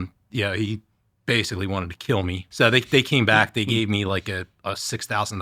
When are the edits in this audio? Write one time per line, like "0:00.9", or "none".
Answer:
0:02.4